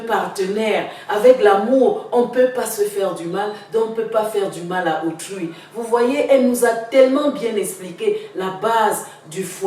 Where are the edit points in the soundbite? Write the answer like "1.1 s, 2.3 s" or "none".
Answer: none